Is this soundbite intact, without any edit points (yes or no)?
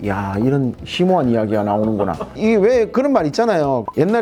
yes